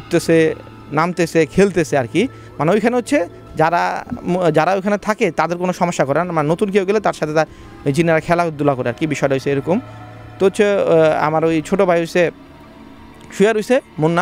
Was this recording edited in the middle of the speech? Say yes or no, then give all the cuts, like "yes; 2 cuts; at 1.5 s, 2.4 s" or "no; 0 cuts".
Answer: no; 0 cuts